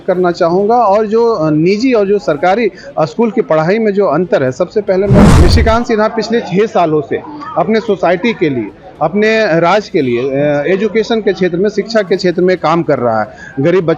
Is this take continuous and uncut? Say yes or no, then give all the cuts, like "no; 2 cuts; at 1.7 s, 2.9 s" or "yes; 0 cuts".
no; 1 cut; at 5.2 s